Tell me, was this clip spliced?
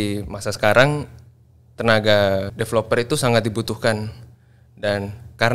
no; 0 cuts

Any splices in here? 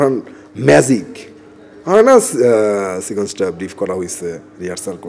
no; 0 cuts

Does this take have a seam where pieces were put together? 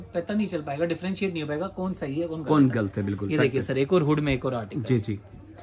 no; 0 cuts

